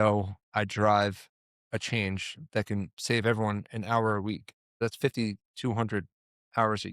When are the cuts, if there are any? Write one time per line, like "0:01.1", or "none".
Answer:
0:04.8